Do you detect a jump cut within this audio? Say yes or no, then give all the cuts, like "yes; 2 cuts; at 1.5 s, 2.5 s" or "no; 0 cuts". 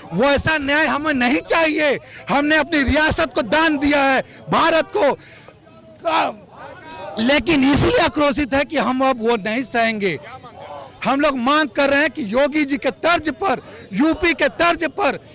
no; 0 cuts